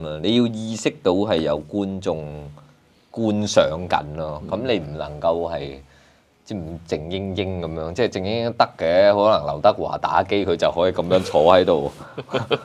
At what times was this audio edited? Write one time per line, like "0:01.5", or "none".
none